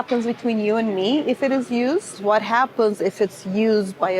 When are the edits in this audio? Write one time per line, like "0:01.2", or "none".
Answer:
0:02.2